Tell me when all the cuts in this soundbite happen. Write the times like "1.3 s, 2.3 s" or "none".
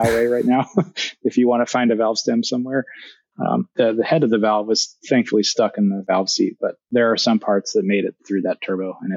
6.8 s, 8.2 s